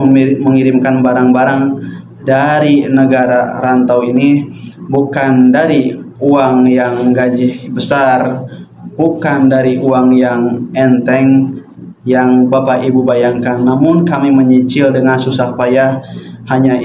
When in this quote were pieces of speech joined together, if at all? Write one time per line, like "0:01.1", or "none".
none